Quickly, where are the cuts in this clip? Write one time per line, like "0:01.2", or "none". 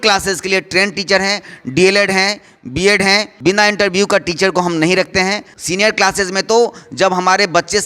0:03.3
0:05.5